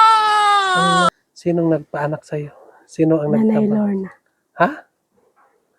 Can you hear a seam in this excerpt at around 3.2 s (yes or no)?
no